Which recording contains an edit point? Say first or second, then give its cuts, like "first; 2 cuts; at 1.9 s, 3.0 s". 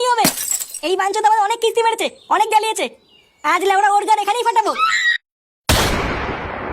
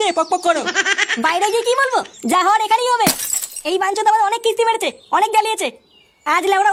first; 1 cut; at 5.5 s